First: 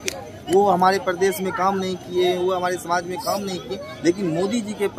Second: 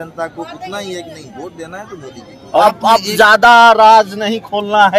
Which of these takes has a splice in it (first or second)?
second